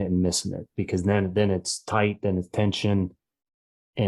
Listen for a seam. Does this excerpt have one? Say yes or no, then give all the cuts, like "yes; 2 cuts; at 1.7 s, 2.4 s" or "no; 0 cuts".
no; 0 cuts